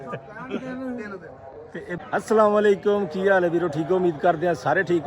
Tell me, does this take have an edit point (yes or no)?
yes